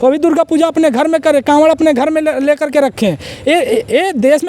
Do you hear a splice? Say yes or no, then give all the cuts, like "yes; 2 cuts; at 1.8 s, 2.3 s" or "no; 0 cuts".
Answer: no; 0 cuts